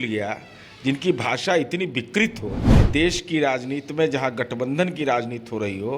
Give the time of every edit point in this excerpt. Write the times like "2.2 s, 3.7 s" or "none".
2.7 s